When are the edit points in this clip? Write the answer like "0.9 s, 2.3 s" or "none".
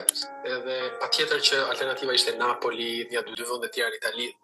3.4 s

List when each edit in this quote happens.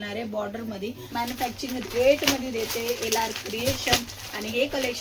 1.0 s

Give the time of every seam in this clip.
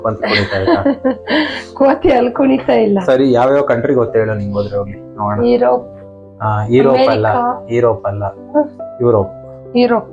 none

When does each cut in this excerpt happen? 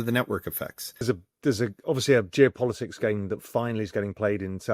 1.0 s

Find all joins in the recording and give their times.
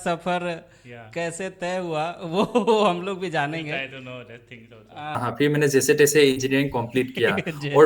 5.2 s

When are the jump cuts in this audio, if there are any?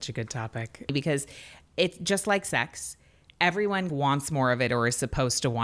0.9 s, 3.9 s

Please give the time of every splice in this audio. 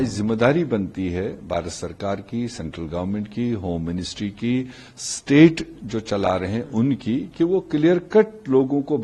none

